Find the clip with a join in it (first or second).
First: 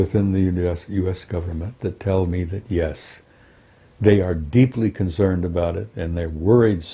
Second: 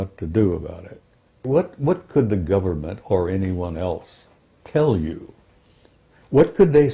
second